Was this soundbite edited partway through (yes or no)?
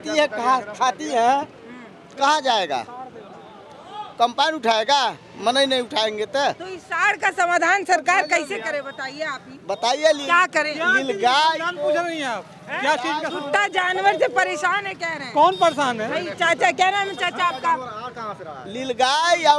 no